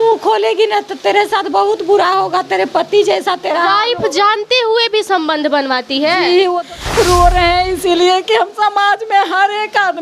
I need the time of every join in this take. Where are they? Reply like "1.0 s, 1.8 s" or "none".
6.6 s